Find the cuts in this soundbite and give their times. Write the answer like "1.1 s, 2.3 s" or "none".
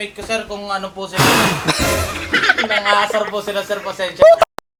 none